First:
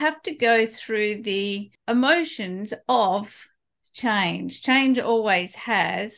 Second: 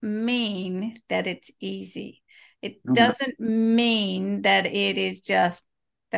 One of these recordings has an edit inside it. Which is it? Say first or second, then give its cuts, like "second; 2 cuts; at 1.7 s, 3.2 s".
first; 1 cut; at 1.7 s